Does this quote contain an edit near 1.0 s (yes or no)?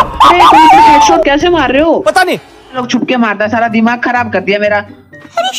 no